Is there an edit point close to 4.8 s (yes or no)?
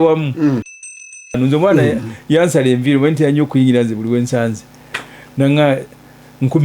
no